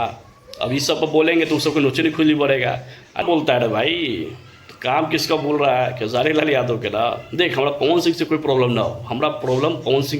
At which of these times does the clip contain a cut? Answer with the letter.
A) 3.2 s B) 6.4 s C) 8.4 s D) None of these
A